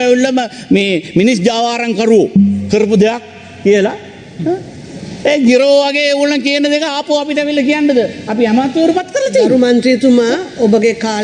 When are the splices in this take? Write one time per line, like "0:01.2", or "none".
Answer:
none